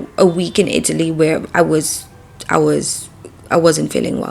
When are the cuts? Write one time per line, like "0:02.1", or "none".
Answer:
none